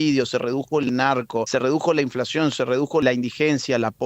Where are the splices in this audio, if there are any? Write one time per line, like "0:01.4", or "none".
0:01.5
0:03.0